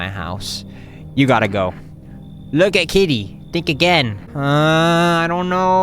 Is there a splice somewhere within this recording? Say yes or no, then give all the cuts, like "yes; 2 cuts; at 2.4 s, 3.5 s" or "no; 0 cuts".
yes; 1 cut; at 4.2 s